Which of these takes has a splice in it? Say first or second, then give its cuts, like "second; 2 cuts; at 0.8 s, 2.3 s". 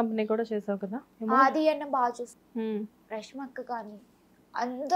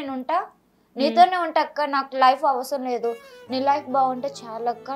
first; 2 cuts; at 1.1 s, 2.4 s